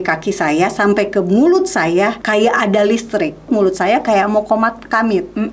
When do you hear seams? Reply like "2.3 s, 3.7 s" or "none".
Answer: 2.2 s, 3.5 s

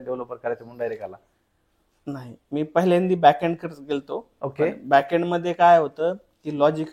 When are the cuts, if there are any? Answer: none

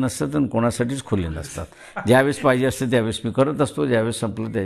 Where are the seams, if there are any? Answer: none

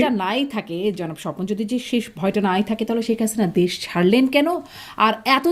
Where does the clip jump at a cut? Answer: none

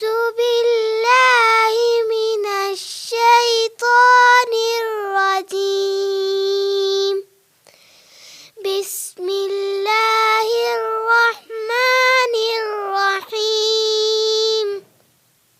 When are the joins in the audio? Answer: none

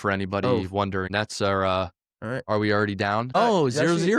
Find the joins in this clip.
1.1 s, 3.3 s

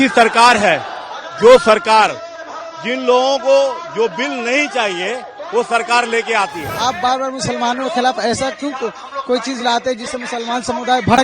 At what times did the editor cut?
6.6 s

